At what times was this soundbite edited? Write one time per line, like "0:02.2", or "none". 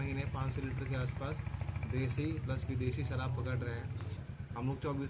0:04.2